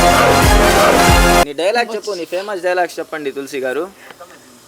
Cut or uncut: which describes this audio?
cut